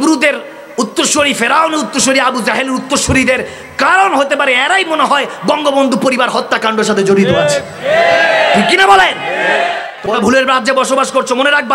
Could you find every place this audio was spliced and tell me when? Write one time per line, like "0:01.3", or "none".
0:10.2